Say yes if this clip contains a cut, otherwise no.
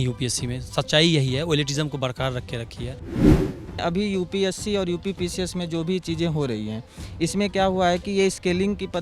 yes